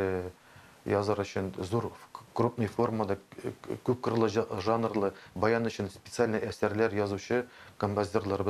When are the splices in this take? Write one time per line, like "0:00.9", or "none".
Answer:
none